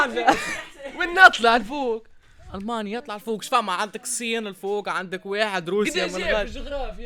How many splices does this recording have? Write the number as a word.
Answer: zero